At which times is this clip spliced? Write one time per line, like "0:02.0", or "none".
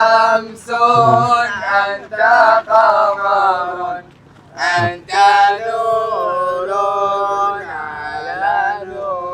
none

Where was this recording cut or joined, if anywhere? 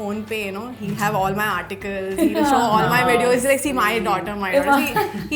none

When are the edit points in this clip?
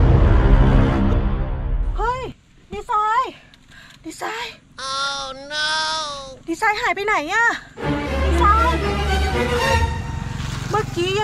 none

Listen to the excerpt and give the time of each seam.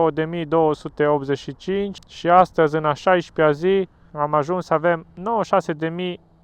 0:01.9
0:04.0

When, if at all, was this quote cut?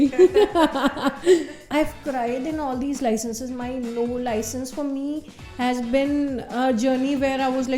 0:01.6

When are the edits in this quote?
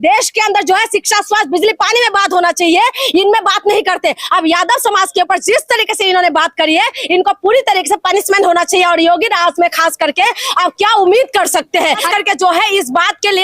0:12.0

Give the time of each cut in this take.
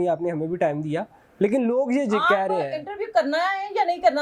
none

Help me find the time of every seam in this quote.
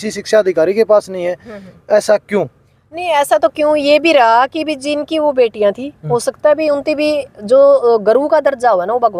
none

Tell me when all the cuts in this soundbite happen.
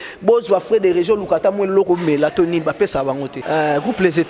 0:03.3

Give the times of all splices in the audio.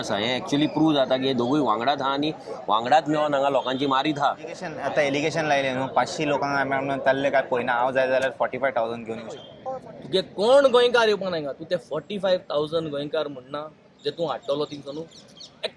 0:04.6
0:09.5

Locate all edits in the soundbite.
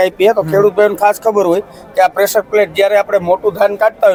none

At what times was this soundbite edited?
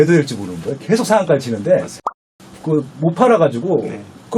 0:02.2

